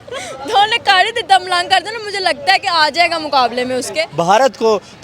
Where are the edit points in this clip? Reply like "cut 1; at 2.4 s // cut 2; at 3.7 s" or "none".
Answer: cut 1; at 4.1 s